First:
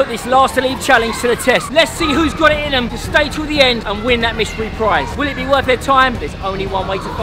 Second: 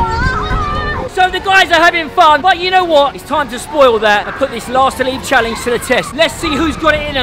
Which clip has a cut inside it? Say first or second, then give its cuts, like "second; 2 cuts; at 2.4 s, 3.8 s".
second; 1 cut; at 1.1 s